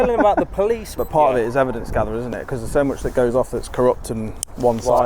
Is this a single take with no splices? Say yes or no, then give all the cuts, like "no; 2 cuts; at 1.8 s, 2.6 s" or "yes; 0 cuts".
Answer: no; 1 cut; at 1.0 s